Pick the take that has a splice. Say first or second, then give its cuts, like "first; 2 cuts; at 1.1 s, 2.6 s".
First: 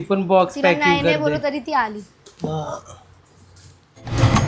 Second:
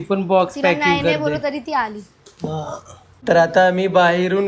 second; 1 cut; at 3.2 s